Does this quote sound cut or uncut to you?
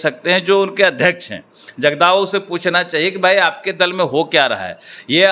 uncut